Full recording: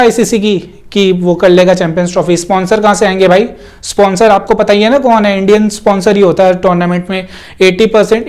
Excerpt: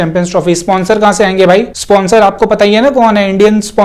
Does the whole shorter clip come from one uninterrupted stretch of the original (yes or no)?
no